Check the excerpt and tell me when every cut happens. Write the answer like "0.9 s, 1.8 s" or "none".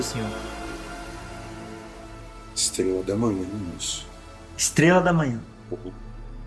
none